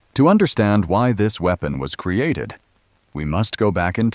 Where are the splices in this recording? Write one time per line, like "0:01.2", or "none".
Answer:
none